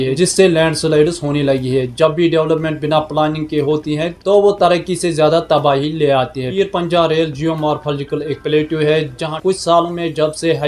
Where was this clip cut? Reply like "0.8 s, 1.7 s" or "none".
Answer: 9.2 s

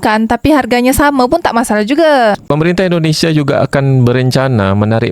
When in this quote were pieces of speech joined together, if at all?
2.4 s

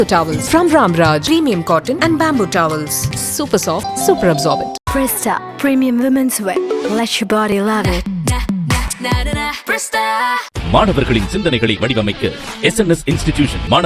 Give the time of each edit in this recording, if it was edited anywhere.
none

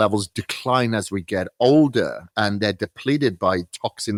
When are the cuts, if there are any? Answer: none

